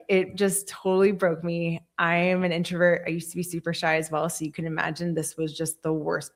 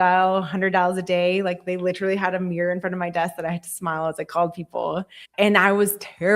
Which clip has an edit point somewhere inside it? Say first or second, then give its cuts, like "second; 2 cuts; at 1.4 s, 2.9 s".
second; 1 cut; at 5.2 s